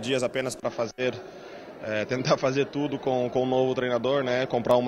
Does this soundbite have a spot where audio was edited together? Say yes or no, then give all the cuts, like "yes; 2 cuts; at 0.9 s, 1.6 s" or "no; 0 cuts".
no; 0 cuts